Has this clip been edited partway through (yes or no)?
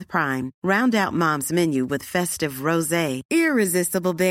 no